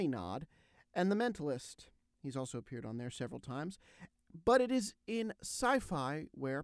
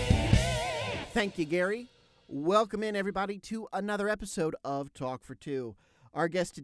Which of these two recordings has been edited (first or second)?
second